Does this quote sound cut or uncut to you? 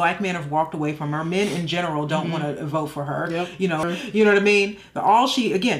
cut